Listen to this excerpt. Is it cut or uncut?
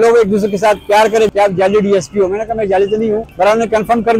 cut